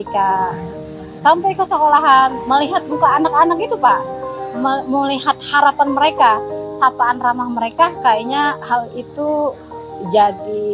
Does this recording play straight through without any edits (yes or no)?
yes